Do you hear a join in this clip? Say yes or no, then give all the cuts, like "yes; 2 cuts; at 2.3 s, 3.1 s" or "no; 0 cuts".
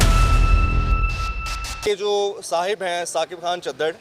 yes; 1 cut; at 1.7 s